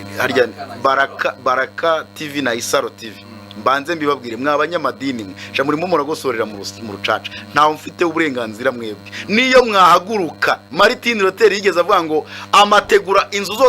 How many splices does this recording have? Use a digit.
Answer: 1